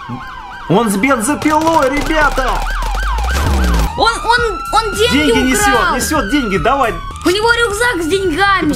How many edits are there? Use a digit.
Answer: 2